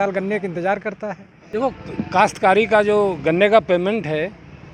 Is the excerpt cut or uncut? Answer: cut